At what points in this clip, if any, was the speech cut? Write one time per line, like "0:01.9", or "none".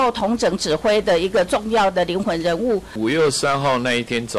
0:02.9